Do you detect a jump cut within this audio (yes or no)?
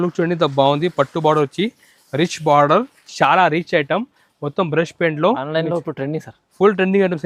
no